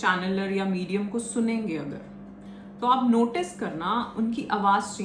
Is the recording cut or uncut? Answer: uncut